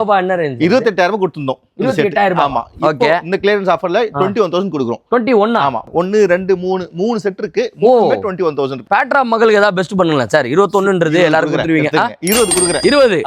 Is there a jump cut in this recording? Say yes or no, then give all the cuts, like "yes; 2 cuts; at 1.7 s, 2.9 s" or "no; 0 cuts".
yes; 2 cuts; at 5.9 s, 8.8 s